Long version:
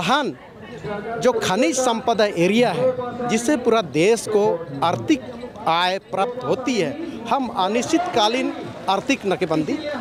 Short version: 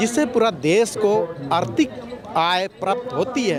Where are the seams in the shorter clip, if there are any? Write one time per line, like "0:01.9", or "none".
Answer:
none